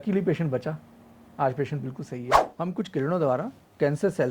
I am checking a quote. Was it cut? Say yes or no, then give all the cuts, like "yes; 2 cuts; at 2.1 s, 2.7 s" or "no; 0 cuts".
yes; 1 cut; at 2.5 s